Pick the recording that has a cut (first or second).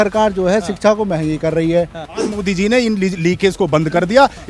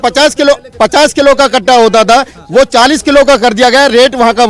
first